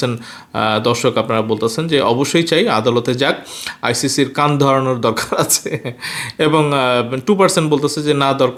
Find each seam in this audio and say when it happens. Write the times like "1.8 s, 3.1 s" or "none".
none